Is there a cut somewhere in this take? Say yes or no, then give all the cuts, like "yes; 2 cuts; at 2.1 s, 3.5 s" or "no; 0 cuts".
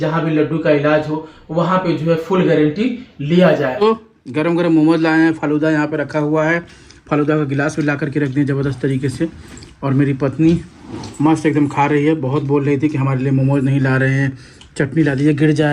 yes; 1 cut; at 3.8 s